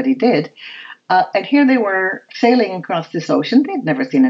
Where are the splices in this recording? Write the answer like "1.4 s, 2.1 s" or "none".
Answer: none